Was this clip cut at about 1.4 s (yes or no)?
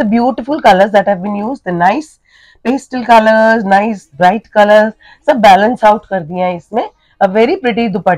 no